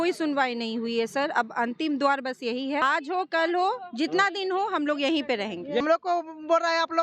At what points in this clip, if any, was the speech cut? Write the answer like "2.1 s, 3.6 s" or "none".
2.8 s, 5.8 s